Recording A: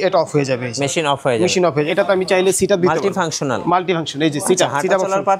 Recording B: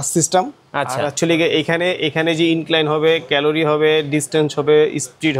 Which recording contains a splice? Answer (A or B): A